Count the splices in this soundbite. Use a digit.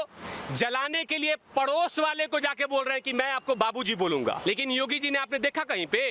1